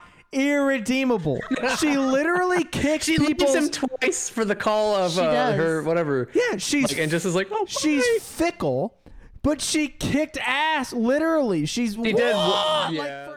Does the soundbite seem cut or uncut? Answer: uncut